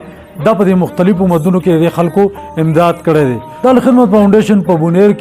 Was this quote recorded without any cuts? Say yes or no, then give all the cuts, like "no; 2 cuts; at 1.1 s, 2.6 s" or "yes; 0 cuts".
no; 1 cut; at 3.5 s